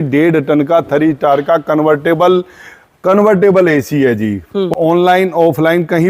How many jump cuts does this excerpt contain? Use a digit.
1